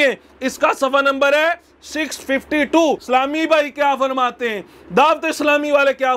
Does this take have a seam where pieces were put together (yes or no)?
yes